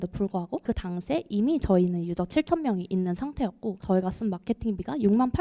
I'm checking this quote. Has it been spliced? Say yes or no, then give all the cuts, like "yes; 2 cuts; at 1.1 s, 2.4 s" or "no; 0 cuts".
yes; 1 cut; at 3.8 s